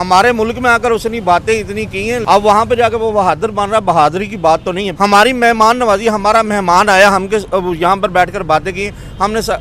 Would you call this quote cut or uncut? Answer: cut